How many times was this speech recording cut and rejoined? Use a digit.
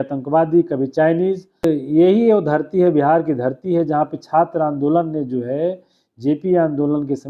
1